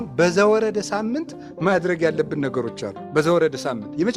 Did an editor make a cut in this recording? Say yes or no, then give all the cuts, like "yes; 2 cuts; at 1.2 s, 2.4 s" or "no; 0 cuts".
no; 0 cuts